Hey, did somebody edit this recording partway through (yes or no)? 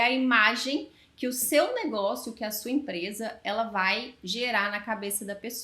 no